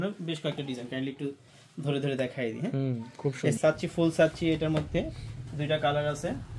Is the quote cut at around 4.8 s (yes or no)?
no